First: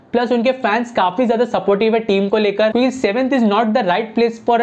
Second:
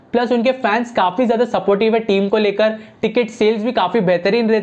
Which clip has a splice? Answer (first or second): first